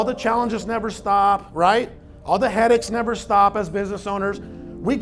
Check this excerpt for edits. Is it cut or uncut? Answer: uncut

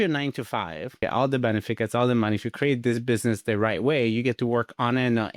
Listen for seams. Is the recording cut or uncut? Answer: cut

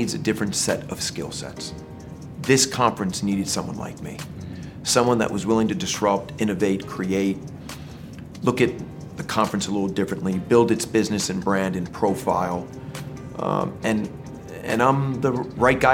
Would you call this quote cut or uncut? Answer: uncut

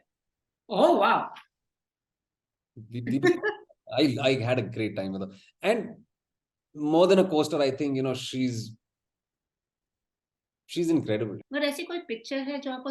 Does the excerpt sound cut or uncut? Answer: cut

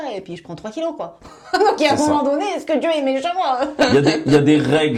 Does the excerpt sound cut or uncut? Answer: uncut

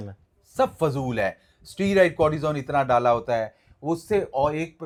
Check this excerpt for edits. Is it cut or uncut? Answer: uncut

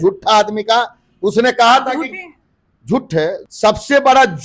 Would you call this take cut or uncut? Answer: cut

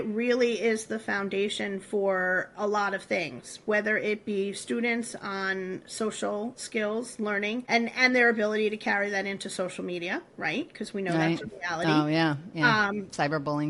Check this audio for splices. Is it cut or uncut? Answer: uncut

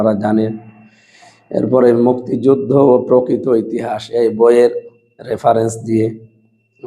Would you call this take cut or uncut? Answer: uncut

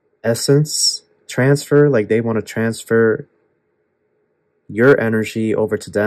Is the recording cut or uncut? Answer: uncut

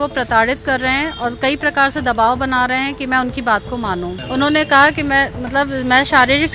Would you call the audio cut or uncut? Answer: cut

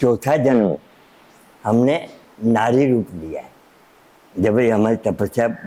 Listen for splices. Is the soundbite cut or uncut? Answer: uncut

